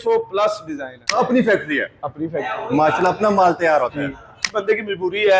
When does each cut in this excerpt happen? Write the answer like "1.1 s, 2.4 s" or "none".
1.2 s, 4.4 s

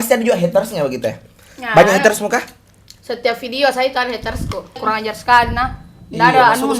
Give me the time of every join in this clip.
4.8 s

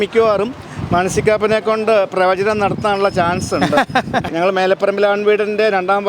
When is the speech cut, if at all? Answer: 4.3 s

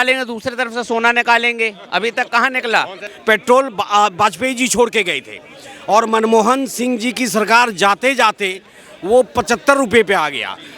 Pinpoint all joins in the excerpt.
3.0 s

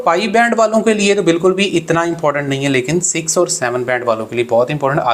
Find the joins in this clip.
none

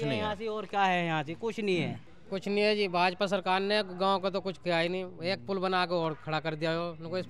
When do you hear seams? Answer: 2.1 s

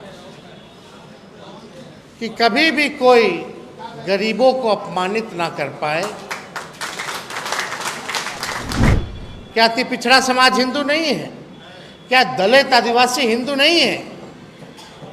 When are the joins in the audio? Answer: 9.0 s

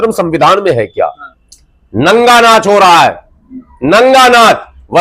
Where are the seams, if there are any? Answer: 1.3 s

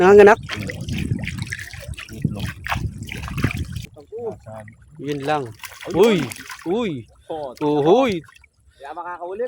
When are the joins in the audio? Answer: 3.9 s

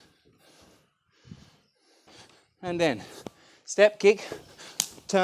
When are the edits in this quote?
2.1 s

